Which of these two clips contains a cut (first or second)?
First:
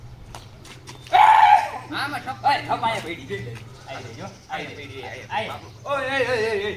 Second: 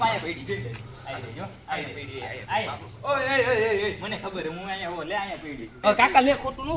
second